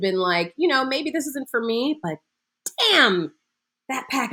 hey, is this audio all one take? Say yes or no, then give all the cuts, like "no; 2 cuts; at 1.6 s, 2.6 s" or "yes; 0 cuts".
yes; 0 cuts